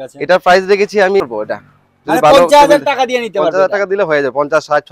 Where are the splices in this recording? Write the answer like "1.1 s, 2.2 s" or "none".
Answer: 1.2 s